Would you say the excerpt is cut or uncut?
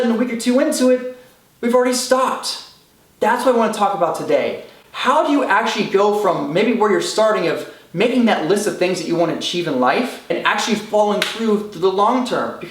cut